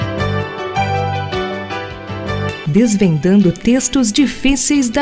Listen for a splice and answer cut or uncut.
uncut